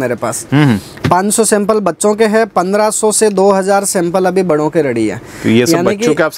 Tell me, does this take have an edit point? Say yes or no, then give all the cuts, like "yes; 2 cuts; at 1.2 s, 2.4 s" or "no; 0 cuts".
no; 0 cuts